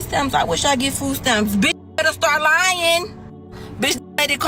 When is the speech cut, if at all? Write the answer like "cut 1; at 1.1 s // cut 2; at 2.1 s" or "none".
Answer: none